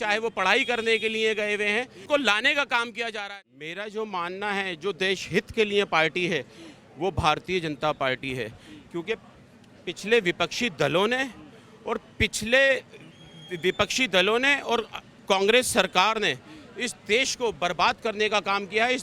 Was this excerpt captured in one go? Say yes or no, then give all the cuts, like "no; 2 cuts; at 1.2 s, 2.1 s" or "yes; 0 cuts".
no; 2 cuts; at 2.0 s, 3.2 s